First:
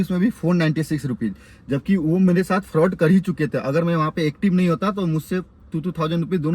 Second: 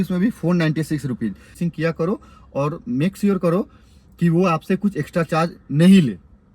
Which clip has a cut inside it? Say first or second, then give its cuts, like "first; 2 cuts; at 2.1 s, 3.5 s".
second; 1 cut; at 1.6 s